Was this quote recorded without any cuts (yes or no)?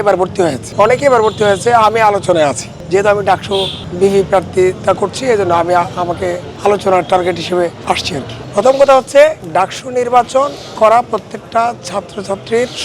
yes